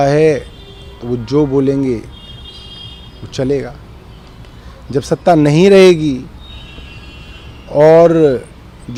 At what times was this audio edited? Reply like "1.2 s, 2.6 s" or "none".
none